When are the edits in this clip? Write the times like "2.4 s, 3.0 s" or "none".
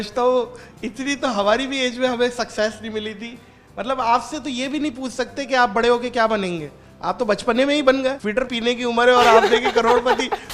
8.5 s